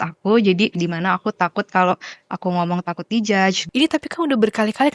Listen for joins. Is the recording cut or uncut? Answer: cut